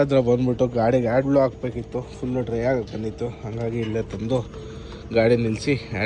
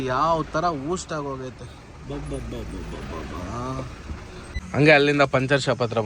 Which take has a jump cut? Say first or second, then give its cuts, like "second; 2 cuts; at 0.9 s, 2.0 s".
second; 1 cut; at 4.5 s